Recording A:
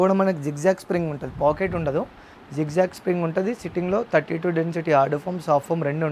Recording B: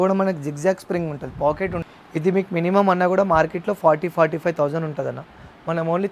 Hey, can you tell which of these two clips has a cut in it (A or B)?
B